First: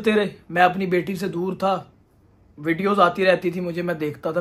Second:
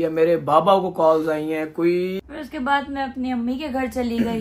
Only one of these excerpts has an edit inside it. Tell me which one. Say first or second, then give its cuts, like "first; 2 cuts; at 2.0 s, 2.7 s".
second; 1 cut; at 2.3 s